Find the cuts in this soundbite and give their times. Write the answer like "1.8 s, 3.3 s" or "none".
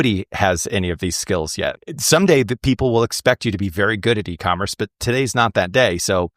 1.8 s